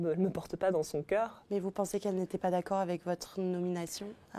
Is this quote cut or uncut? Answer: cut